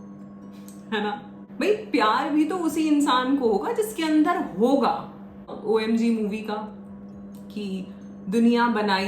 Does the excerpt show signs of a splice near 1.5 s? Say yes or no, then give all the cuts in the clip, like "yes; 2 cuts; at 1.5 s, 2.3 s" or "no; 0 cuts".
yes; 2 cuts; at 1.5 s, 5.5 s